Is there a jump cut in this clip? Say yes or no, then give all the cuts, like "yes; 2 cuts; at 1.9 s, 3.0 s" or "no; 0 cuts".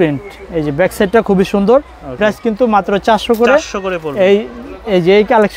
no; 0 cuts